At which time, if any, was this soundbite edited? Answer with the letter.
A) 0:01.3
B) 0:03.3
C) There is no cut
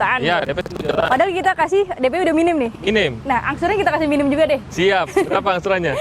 C